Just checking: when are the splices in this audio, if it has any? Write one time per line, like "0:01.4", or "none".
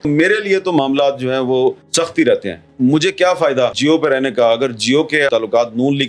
0:01.8
0:03.8
0:05.3